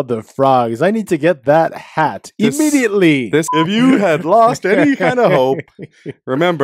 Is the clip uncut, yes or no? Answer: no